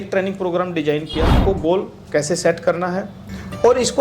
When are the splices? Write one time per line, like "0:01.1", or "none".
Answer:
0:01.4